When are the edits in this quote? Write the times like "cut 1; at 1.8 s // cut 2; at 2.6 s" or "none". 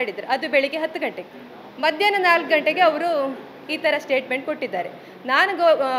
none